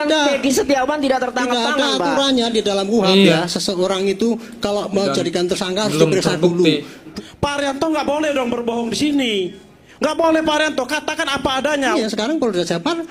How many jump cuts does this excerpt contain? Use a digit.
2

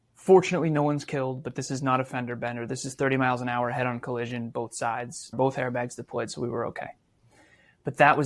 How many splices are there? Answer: 1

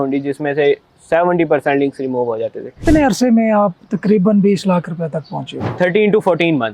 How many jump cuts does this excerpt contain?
2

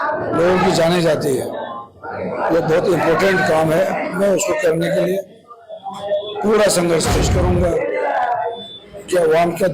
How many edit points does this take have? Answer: 1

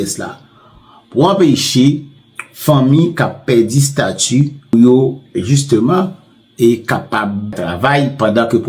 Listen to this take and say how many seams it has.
2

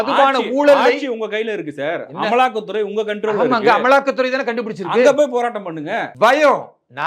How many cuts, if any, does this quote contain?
1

